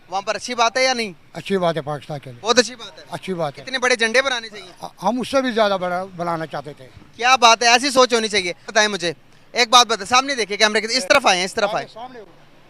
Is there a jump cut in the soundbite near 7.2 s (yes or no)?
no